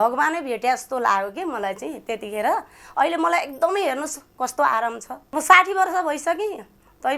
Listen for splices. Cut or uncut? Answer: cut